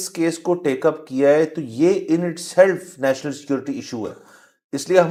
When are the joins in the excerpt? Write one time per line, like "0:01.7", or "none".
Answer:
none